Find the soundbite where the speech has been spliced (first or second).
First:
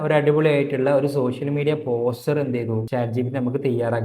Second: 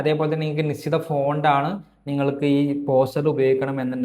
first